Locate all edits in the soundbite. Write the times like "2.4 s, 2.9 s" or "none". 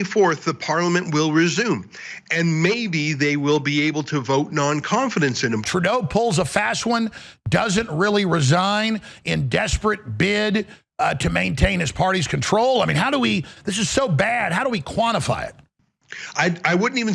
5.6 s